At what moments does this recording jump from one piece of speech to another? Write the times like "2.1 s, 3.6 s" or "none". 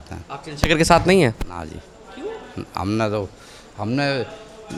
none